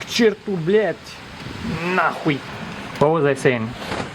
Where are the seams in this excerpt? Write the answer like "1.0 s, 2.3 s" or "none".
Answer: 2.5 s